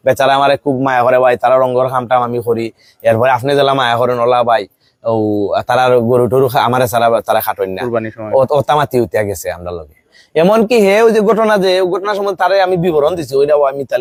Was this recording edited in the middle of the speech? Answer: no; 0 cuts

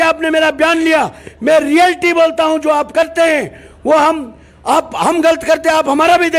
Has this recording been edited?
no; 0 cuts

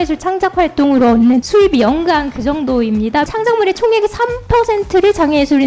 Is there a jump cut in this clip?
yes; 2 cuts; at 1.5 s, 3.3 s

